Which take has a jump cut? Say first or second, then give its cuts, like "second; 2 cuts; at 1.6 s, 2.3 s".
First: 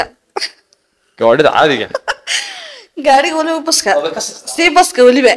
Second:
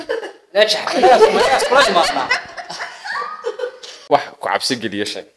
second; 1 cut; at 4.0 s